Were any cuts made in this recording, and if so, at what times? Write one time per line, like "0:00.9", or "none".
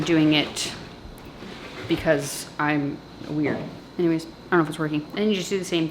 0:03.7
0:05.1